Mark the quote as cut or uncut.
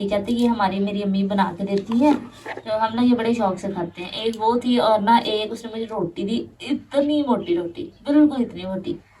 uncut